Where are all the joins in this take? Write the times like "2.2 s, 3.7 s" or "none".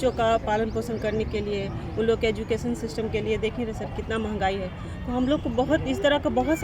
none

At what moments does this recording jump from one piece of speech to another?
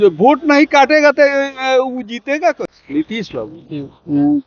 2.8 s

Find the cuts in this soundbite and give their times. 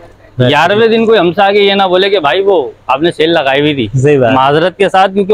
none

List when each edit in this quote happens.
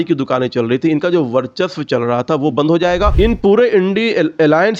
3.1 s

